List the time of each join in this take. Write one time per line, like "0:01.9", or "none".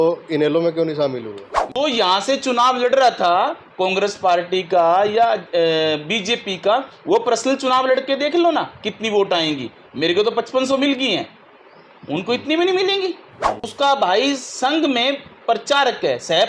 0:01.8
0:13.7